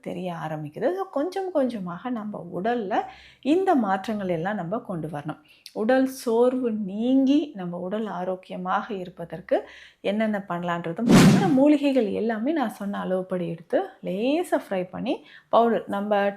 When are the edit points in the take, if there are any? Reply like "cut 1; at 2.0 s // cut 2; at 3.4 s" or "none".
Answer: cut 1; at 11.3 s